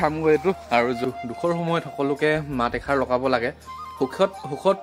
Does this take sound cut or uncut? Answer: cut